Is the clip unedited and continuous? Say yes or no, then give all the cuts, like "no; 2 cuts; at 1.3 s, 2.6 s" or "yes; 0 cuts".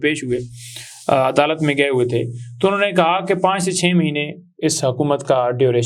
yes; 0 cuts